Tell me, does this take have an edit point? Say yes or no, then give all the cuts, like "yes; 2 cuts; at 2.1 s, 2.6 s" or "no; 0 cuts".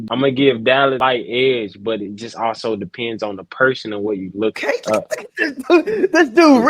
yes; 2 cuts; at 1.0 s, 4.6 s